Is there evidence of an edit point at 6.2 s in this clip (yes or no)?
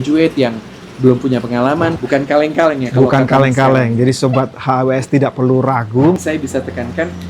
yes